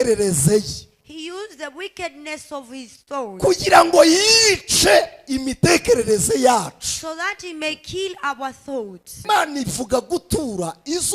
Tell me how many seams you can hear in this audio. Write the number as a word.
one